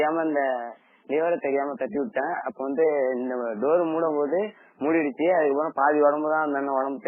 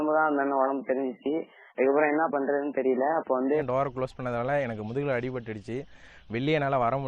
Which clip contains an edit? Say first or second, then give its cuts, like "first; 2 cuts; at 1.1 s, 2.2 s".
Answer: second; 1 cut; at 3.6 s